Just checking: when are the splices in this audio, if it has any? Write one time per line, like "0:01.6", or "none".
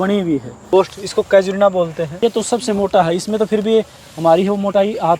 0:00.7
0:02.2